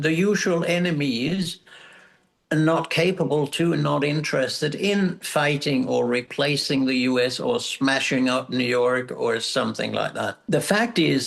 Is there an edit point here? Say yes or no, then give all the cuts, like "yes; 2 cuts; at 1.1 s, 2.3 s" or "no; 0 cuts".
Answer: yes; 1 cut; at 10.4 s